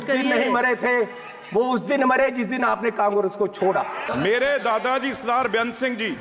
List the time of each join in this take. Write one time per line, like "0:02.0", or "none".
0:04.0